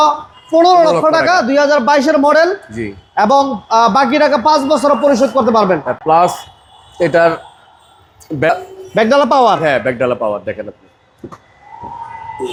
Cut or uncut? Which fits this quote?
uncut